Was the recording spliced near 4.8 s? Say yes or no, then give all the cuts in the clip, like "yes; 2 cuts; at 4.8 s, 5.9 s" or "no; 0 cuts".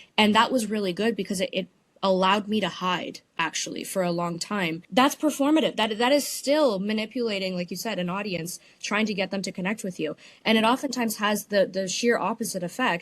yes; 1 cut; at 4.8 s